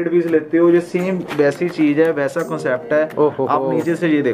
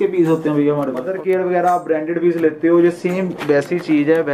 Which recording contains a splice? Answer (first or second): second